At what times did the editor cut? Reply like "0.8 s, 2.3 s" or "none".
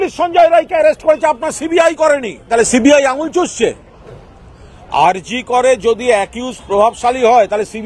2.5 s

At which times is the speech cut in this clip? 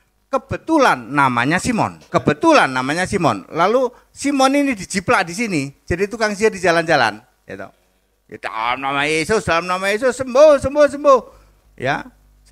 2.0 s

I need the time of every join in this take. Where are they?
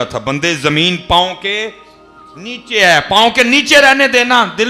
none

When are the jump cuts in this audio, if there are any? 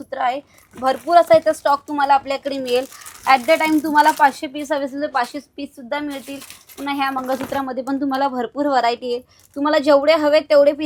none

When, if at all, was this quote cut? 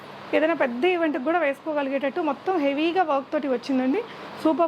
none

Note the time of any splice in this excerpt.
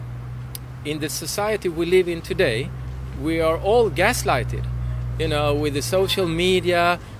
none

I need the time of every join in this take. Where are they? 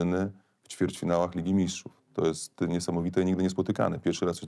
none

